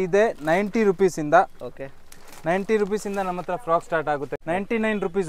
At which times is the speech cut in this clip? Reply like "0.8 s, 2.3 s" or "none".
4.3 s